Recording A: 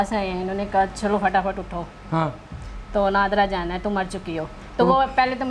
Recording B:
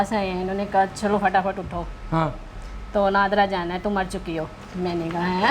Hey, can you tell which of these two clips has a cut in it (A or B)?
A